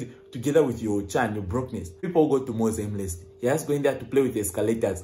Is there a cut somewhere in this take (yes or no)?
yes